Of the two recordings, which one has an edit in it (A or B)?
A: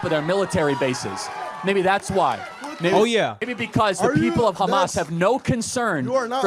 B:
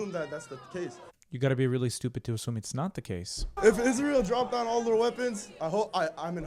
B